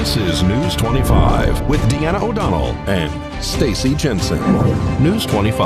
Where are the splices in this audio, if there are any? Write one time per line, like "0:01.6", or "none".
none